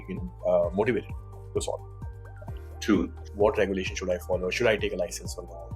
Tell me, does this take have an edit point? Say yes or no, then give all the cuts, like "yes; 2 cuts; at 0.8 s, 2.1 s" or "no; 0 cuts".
yes; 1 cut; at 3.2 s